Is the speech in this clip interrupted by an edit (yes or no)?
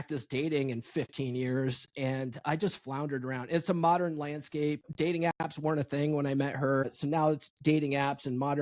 yes